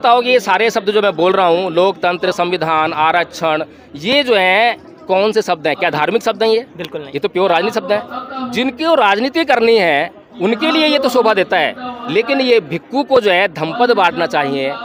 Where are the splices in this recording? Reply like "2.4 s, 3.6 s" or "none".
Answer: none